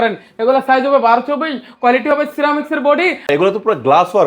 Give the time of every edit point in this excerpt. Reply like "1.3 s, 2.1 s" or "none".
3.3 s

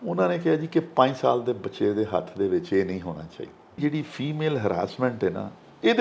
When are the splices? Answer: 3.8 s

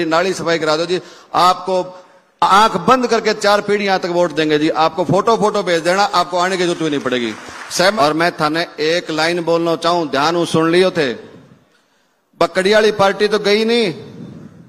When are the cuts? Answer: 8.0 s

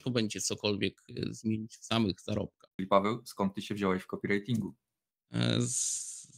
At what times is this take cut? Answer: 2.7 s

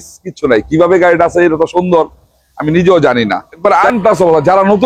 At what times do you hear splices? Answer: 3.5 s

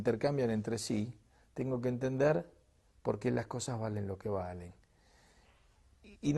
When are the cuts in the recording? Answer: 2.8 s

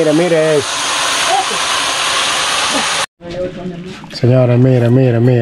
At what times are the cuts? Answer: 3.0 s

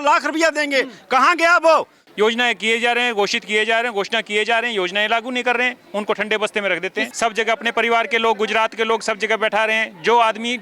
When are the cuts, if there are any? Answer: 2.0 s, 7.1 s

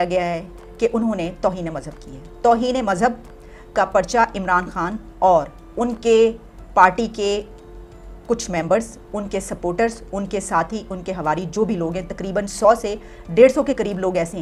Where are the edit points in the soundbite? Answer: none

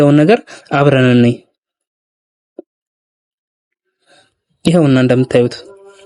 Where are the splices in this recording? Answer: none

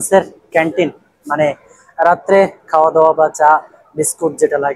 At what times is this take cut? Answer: none

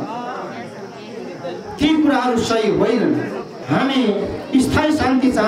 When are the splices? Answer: 3.5 s

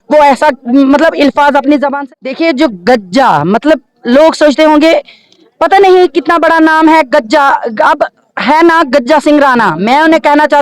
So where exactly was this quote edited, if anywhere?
1.9 s

